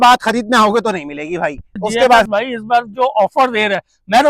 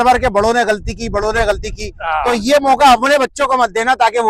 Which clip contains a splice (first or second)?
first